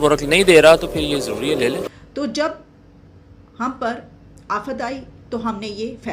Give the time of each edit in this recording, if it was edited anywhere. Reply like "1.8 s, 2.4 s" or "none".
1.9 s